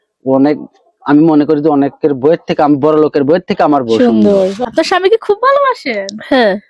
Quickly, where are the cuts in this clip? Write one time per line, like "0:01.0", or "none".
0:04.6